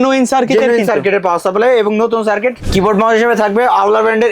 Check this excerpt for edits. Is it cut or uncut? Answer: cut